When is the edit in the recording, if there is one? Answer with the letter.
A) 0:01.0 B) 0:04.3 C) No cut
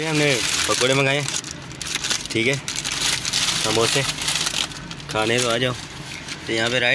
C